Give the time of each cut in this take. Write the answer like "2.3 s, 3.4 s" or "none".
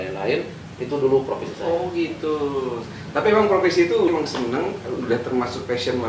4.1 s